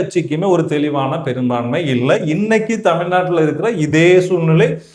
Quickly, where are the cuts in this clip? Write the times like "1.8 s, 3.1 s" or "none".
none

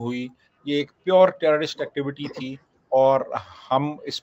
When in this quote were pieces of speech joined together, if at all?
none

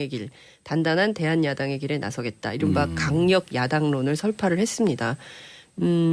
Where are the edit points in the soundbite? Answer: 3.2 s

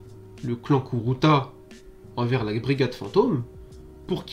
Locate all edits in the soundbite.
none

